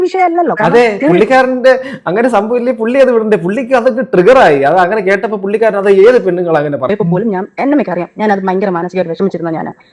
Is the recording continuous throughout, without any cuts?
no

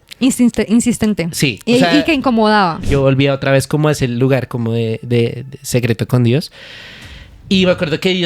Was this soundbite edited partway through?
yes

